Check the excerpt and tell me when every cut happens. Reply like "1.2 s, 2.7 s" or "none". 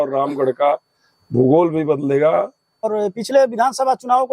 2.9 s